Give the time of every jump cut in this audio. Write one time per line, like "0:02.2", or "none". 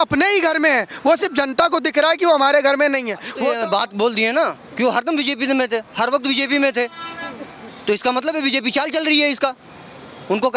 0:03.4